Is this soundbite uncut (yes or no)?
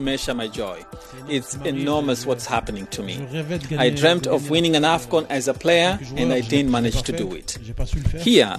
yes